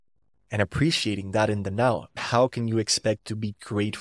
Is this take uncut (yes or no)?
no